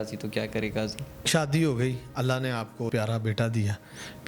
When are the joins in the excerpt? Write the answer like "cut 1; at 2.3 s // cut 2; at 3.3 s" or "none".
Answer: cut 1; at 1.2 s // cut 2; at 2.9 s